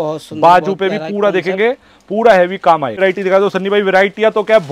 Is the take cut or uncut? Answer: cut